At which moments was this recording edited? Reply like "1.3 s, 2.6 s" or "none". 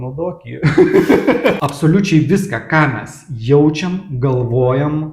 1.6 s